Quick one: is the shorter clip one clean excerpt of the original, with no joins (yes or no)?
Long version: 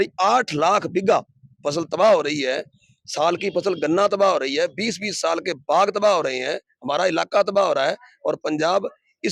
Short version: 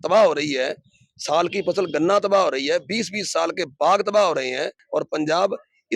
no